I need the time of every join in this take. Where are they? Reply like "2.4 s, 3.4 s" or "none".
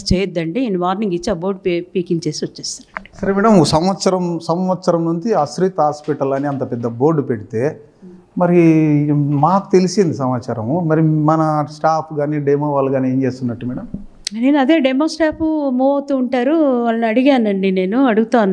none